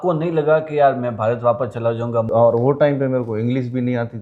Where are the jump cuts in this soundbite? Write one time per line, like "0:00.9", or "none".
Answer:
0:02.3